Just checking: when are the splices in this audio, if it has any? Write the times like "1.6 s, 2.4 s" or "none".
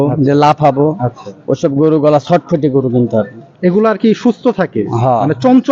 none